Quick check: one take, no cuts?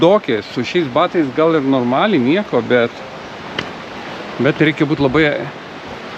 no; 1 cut; at 4.0 s

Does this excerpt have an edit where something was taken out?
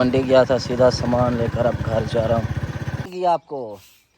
yes; 1 cut; at 3.1 s

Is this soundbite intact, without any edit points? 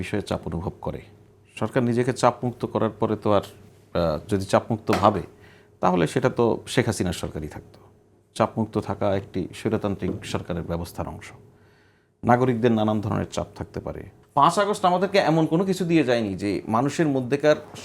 no; 1 cut; at 14.1 s

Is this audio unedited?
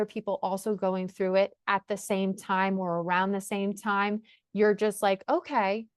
yes; 0 cuts

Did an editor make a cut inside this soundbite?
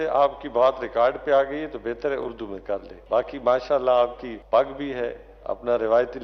yes; 2 cuts; at 2.9 s, 4.3 s

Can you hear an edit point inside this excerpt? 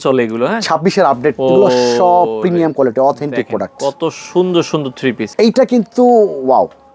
yes; 2 cuts; at 1.4 s, 5.2 s

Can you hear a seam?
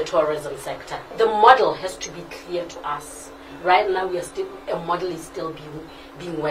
yes; 1 cut; at 1.0 s

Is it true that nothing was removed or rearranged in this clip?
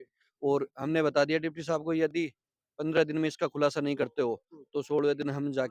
no; 1 cut; at 3.8 s

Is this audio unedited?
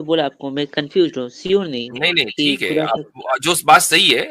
yes; 0 cuts

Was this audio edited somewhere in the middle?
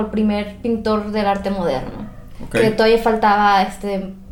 no; 0 cuts

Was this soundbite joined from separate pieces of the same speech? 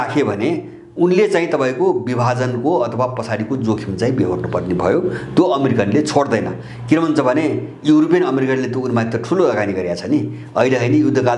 no; 0 cuts

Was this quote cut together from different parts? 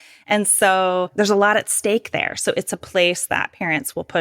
yes; 1 cut; at 1.1 s

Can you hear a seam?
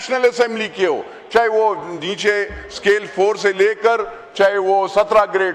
no; 0 cuts

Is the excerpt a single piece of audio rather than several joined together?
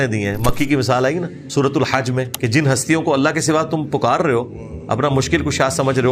no; 2 cuts; at 1.4 s, 2.3 s

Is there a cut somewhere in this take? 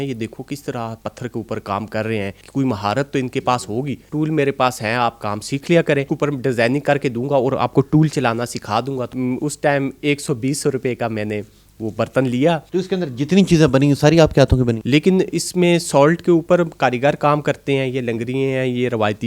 yes; 6 cuts; at 2.4 s, 4.0 s, 6.1 s, 9.1 s, 12.6 s, 14.8 s

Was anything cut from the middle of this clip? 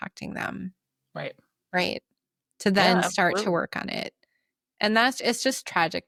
no; 0 cuts

